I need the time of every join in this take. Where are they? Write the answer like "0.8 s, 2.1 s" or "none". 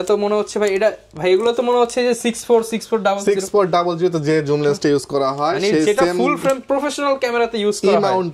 none

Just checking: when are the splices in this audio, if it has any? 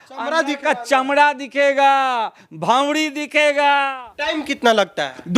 4.0 s

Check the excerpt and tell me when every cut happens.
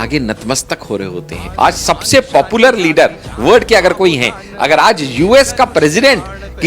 1.5 s

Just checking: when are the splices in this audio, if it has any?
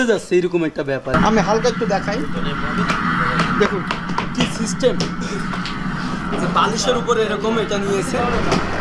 1.1 s

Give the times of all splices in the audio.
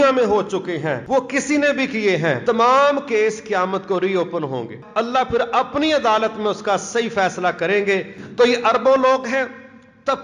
1.0 s, 2.4 s, 4.8 s, 8.2 s

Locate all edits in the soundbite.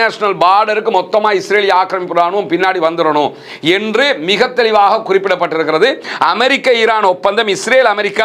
6.1 s

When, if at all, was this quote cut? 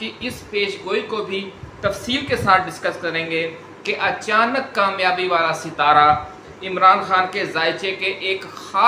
none

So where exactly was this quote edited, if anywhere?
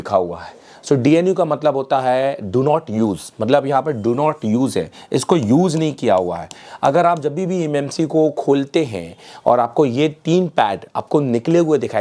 none

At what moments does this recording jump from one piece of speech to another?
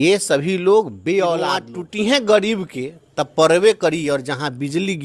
1.8 s

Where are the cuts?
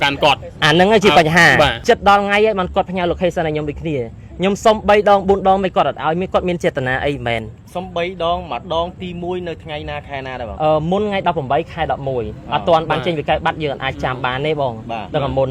1.8 s

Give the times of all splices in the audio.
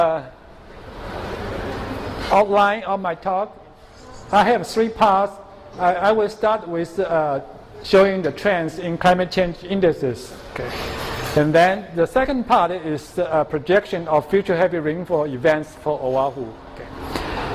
none

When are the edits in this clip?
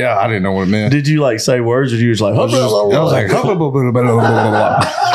none

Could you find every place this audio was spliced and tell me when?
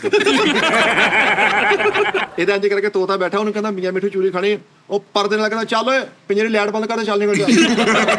2.3 s

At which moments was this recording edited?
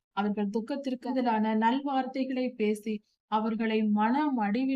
1.1 s

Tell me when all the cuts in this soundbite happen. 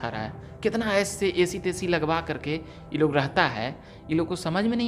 none

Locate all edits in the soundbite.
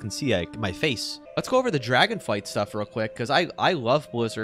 1.2 s

